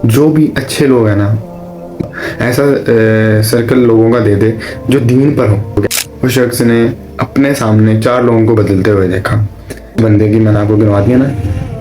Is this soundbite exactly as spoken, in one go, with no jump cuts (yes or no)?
no